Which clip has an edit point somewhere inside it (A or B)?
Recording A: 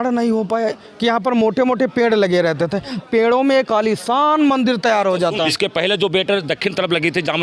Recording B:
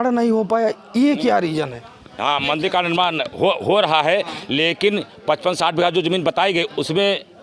A